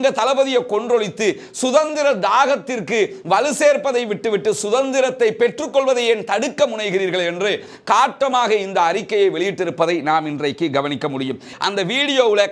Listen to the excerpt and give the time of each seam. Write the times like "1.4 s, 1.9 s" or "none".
11.5 s